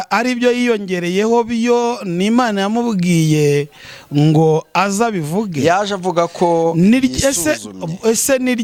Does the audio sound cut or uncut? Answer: uncut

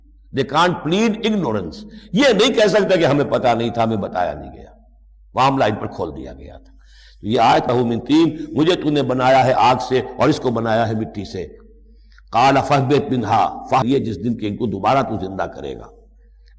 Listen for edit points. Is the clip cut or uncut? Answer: cut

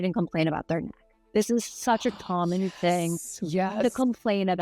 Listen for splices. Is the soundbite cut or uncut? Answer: uncut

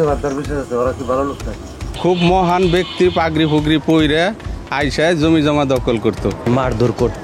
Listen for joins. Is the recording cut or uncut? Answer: cut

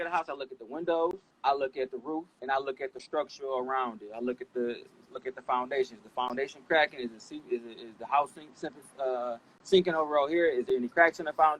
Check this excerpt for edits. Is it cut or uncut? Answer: cut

